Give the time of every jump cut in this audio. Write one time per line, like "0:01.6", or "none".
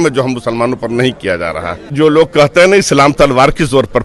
0:01.9